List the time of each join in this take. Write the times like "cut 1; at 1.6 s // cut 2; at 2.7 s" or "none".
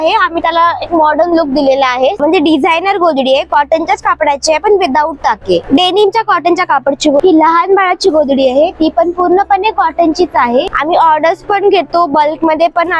cut 1; at 2.2 s // cut 2; at 5.7 s // cut 3; at 7.2 s // cut 4; at 10.7 s